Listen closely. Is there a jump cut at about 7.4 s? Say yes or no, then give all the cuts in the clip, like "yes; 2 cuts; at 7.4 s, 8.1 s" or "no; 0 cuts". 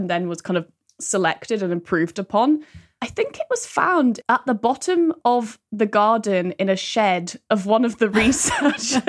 no; 1 cut; at 4.2 s